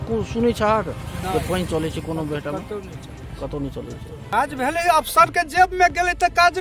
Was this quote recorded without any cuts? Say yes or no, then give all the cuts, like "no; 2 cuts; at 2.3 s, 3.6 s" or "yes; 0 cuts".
no; 1 cut; at 4.3 s